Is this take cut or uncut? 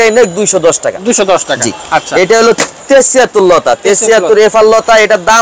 uncut